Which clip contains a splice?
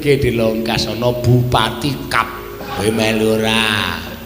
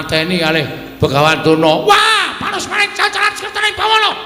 first; 1 cut; at 2.7 s

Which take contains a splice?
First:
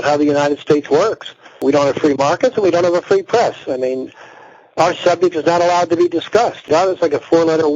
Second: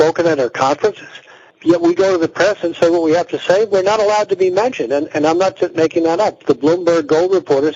first; 1 cut; at 1.6 s

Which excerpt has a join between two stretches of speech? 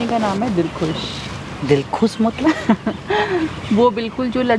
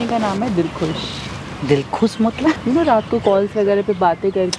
second; 1 cut; at 2.6 s

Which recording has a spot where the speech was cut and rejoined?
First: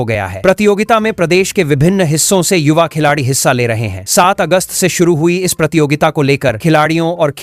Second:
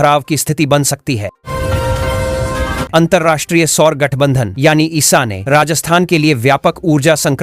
second; 2 cuts; at 1.4 s, 2.9 s

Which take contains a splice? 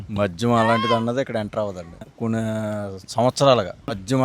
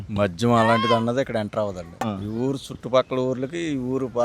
second; 1 cut; at 2.1 s

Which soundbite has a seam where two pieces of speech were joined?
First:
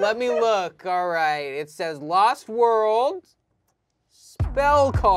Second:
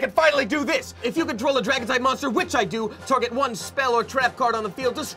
second; 1 cut; at 1.0 s

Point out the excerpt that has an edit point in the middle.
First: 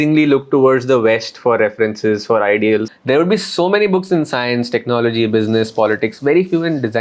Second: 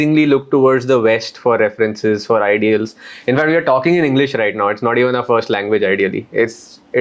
first; 1 cut; at 2.9 s

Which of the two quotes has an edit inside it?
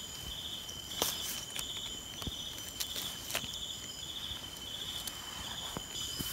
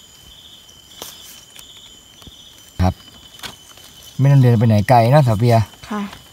second; 1 cut; at 2.8 s

